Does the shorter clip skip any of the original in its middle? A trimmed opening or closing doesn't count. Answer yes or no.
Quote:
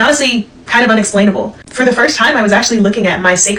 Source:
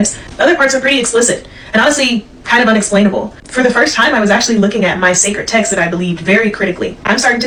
no